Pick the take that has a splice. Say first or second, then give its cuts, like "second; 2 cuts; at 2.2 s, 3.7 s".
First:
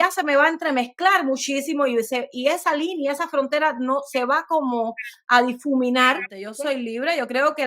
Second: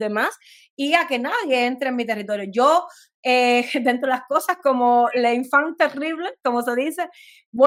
first; 1 cut; at 6.4 s